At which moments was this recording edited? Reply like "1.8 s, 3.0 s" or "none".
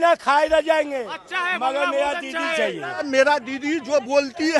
3.0 s